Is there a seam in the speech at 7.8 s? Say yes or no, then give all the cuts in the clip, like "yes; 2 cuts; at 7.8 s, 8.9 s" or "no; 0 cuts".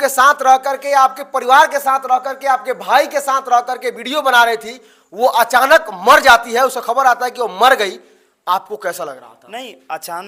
no; 0 cuts